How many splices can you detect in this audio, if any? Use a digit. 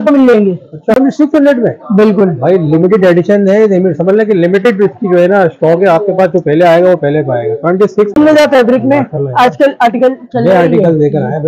2